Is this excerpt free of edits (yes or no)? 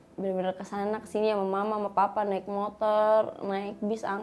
yes